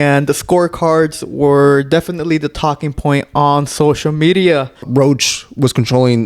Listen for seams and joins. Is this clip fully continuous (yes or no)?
no